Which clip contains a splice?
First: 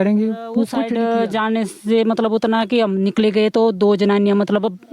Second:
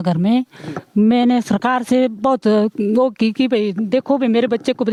first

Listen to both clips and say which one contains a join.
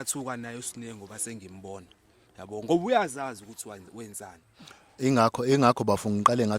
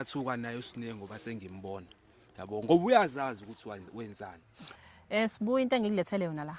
second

